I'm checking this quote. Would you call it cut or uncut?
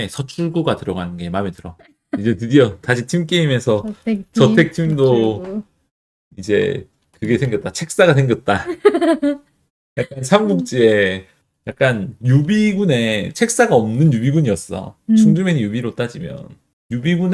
uncut